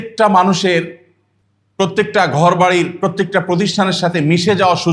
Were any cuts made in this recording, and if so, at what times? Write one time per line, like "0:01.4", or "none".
0:01.9